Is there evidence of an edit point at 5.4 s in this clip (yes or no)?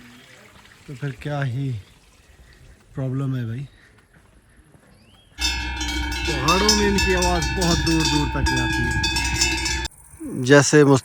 yes